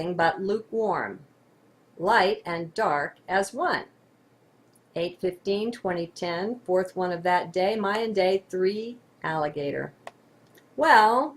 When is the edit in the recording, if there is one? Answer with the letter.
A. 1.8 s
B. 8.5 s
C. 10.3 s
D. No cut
A